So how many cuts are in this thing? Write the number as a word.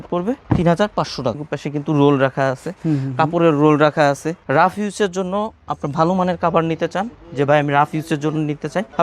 two